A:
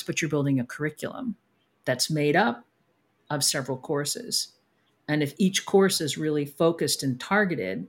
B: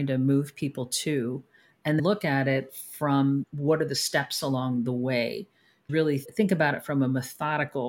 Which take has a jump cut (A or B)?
B